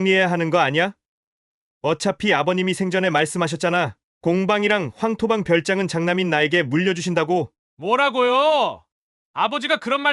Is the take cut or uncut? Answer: cut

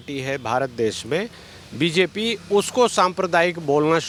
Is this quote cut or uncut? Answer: uncut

